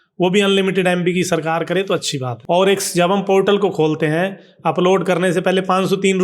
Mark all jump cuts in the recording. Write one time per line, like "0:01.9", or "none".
0:02.3